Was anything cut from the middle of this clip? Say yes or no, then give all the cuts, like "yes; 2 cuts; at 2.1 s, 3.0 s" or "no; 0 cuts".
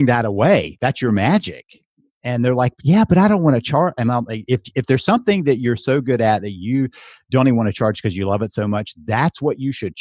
no; 0 cuts